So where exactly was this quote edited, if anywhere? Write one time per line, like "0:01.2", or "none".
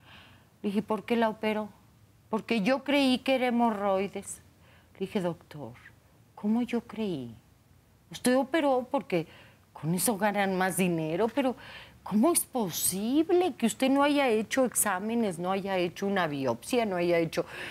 none